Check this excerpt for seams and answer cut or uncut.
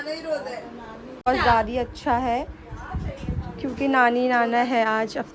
cut